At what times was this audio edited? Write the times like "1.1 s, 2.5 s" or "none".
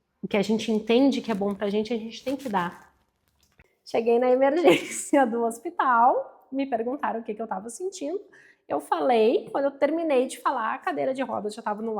3.5 s